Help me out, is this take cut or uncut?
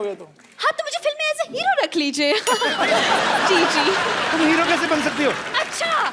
uncut